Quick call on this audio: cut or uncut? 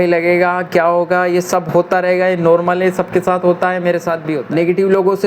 cut